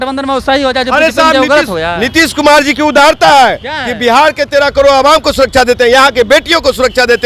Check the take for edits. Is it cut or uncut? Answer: uncut